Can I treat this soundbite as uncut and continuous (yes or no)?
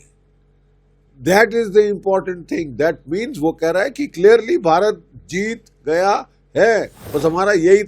no